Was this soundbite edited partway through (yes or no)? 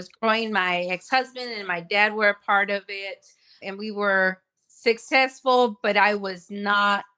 no